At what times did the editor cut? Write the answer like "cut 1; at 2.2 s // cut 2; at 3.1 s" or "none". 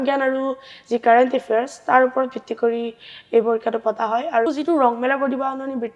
cut 1; at 4.5 s

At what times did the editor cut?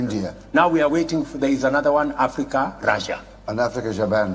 cut 1; at 0.9 s

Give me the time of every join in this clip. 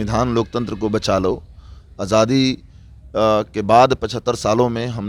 none

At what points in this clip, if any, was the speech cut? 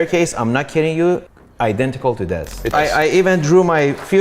cut 1; at 1.4 s // cut 2; at 2.7 s

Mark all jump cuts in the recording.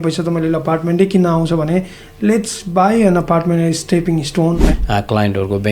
cut 1; at 4.7 s

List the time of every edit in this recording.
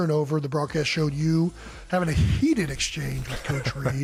none

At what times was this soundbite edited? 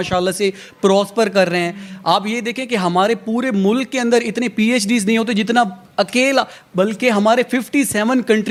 none

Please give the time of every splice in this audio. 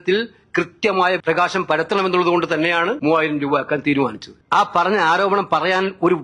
cut 1; at 1.2 s // cut 2; at 3.0 s // cut 3; at 4.3 s

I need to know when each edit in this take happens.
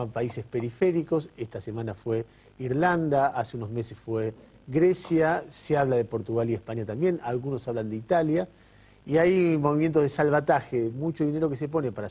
cut 1; at 1.6 s

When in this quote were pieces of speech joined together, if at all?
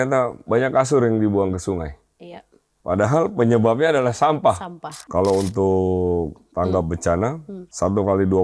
cut 1; at 5.0 s

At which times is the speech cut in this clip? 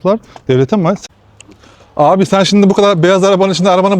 cut 1; at 1.0 s

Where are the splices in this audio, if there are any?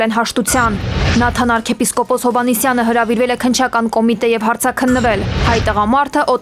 cut 1; at 1.1 s

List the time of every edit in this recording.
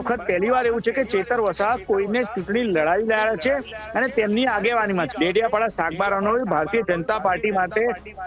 cut 1; at 5.1 s

